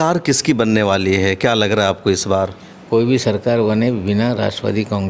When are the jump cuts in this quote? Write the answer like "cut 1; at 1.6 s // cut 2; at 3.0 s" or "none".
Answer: none